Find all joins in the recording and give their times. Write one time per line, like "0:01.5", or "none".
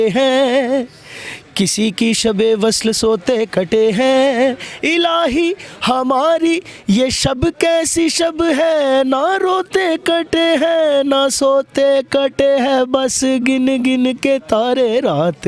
none